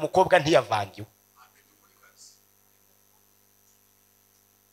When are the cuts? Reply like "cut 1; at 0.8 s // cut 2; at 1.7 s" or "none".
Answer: none